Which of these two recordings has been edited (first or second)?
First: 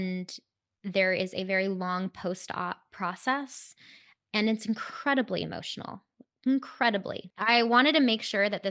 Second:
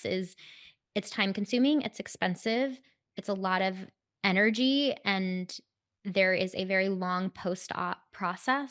first